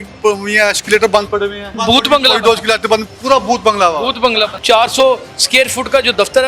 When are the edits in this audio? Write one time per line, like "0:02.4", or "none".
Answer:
0:01.8
0:04.6